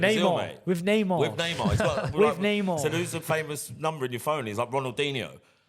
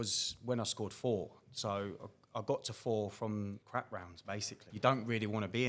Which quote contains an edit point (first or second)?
second